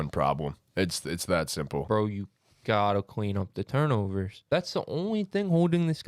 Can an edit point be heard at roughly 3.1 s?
no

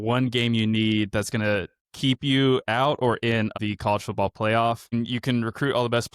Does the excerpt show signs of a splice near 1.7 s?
no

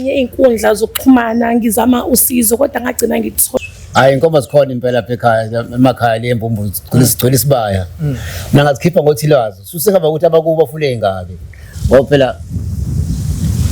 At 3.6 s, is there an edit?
yes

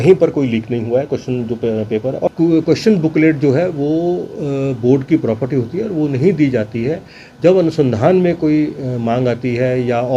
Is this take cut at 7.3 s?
no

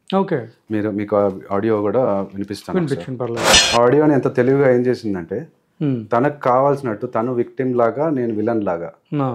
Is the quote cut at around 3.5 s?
yes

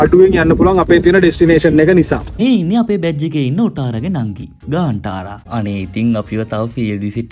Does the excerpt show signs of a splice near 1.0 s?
no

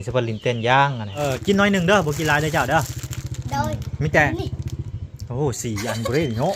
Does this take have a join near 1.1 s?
yes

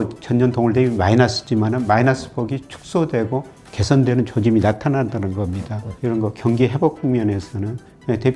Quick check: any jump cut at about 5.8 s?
yes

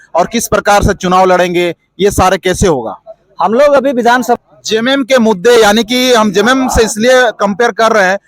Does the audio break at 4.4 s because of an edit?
yes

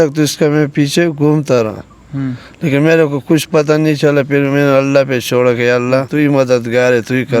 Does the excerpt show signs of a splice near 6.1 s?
yes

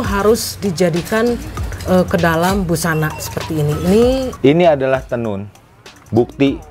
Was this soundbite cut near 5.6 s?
no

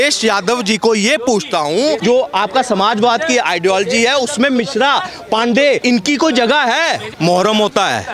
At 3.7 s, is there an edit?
no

